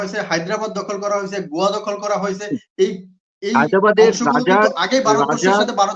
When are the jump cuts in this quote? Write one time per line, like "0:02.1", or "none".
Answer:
none